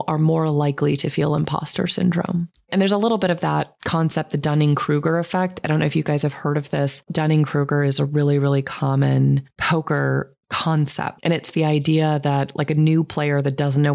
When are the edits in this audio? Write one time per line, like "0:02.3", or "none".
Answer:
0:02.7
0:03.7
0:07.0